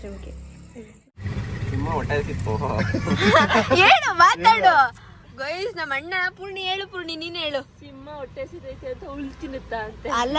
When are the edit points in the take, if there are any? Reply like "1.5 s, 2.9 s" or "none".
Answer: 1.2 s